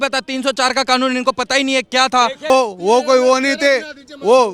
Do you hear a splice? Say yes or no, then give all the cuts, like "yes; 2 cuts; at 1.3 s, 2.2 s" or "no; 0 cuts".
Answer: yes; 1 cut; at 2.5 s